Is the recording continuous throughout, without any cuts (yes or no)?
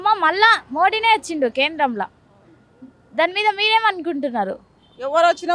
yes